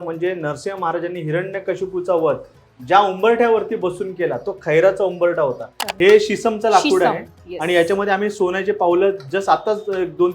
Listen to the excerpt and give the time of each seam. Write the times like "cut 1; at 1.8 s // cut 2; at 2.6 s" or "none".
cut 1; at 5.8 s